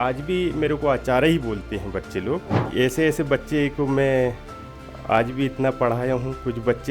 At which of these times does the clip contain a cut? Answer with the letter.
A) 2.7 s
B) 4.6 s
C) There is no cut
A